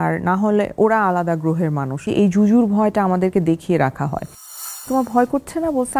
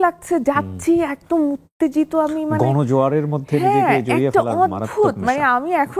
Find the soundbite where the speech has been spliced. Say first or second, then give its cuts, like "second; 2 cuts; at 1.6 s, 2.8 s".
first; 2 cuts; at 2.1 s, 4.8 s